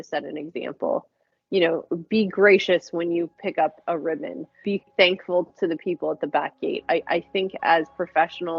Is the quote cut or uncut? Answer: uncut